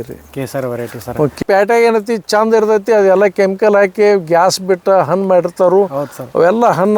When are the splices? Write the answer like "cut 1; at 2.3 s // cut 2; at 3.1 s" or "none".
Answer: cut 1; at 1.4 s